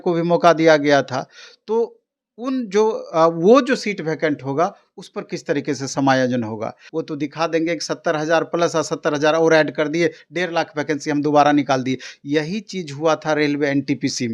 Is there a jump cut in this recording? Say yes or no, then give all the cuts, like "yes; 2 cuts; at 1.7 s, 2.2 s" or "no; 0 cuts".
yes; 1 cut; at 6.8 s